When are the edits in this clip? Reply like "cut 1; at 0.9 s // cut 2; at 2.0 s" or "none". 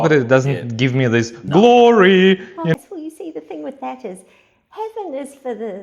cut 1; at 2.7 s